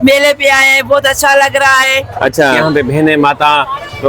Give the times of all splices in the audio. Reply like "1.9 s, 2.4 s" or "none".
2.6 s

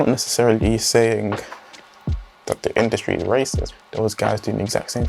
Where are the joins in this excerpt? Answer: 3.7 s

